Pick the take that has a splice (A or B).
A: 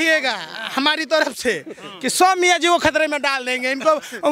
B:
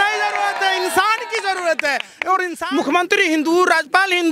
B